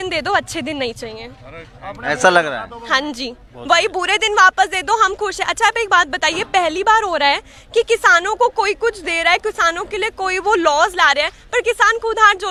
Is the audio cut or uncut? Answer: uncut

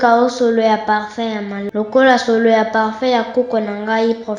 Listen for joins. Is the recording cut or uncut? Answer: cut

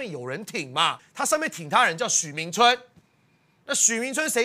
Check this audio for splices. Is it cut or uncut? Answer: cut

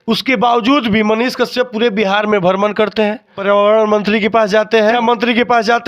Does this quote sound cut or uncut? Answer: cut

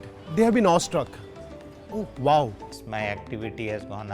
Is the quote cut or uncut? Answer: cut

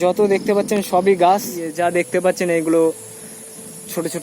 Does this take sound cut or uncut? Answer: cut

